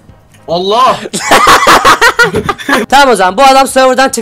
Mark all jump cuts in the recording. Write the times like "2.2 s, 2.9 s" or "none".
2.9 s